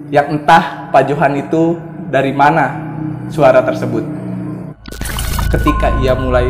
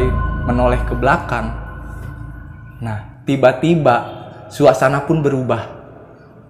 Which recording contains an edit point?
first; 1 cut; at 4.9 s

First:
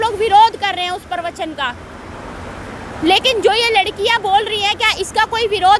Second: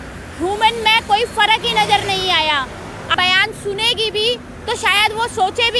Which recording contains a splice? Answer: second; 1 cut; at 3.1 s

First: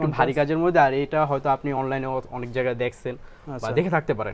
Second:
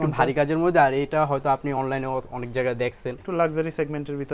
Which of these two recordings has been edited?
second; 1 cut; at 3.2 s

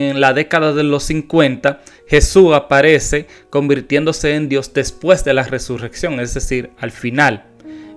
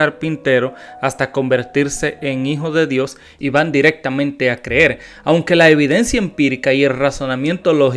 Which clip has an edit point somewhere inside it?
second; 1 cut; at 3.3 s

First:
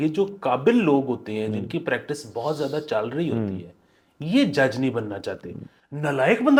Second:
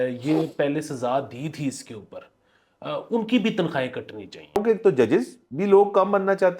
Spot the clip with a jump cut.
second; 2 cuts; at 4.6 s, 5.4 s

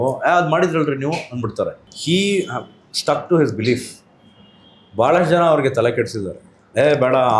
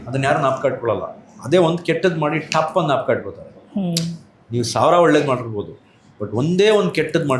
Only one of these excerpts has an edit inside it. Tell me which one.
first; 1 cut; at 1.9 s

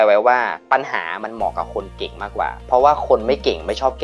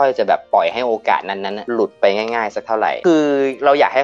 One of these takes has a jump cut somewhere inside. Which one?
second; 1 cut; at 3.0 s

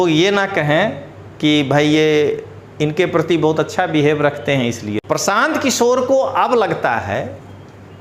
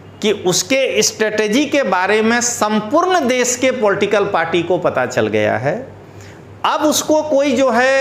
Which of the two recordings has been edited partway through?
first; 1 cut; at 4.9 s

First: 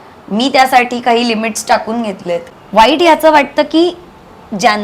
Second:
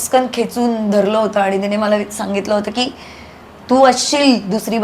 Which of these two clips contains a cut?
first; 1 cut; at 2.5 s

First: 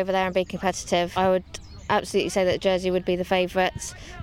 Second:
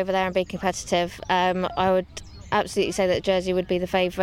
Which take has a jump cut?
first; 1 cut; at 1.1 s

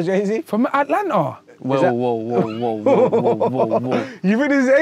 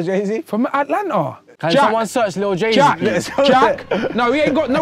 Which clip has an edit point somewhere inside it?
second; 1 cut; at 1.6 s

